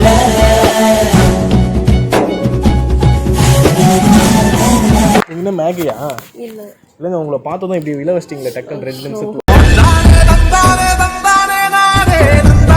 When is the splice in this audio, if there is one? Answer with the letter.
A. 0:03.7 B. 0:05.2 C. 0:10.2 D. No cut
B